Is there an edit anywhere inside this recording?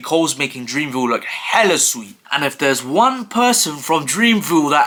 no; 0 cuts

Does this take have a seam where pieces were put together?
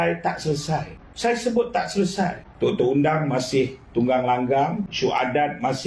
yes; 3 cuts; at 1.0 s, 2.4 s, 4.9 s

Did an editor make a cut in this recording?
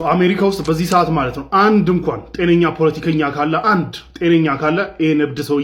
no; 0 cuts

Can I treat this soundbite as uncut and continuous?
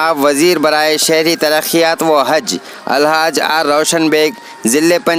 yes; 0 cuts

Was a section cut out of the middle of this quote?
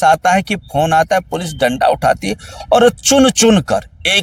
no; 0 cuts

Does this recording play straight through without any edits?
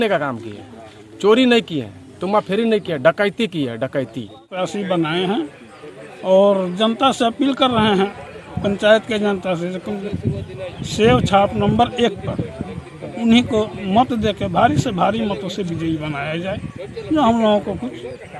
no; 1 cut; at 4.5 s

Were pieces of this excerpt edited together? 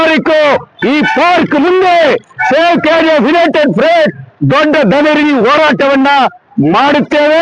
no; 0 cuts

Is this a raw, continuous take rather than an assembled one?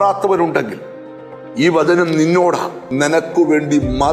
no; 1 cut; at 2.8 s

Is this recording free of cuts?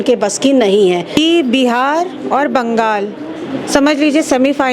no; 1 cut; at 1.2 s

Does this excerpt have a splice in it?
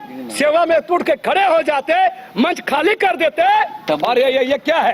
yes; 1 cut; at 3.8 s

